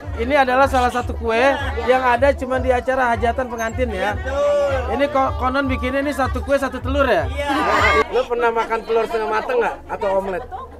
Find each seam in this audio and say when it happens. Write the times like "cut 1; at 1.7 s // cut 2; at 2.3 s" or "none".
cut 1; at 8.0 s